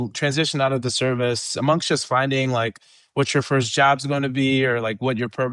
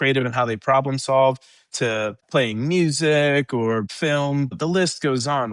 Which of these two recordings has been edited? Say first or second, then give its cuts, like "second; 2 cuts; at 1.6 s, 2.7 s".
second; 2 cuts; at 2.2 s, 4.3 s